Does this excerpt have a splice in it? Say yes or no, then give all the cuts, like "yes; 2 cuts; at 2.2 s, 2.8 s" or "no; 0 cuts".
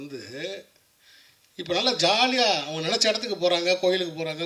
no; 0 cuts